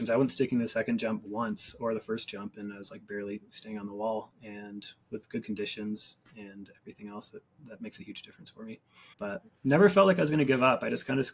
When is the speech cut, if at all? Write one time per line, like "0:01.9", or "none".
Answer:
0:07.5
0:09.0